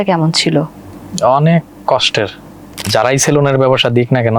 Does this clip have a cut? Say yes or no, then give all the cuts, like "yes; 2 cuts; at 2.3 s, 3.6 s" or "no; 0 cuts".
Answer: yes; 1 cut; at 2.9 s